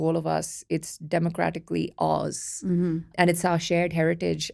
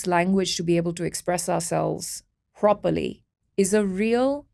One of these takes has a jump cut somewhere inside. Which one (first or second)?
first